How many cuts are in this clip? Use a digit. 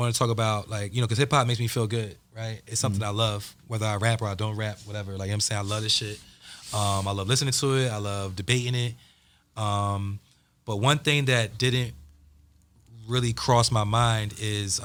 0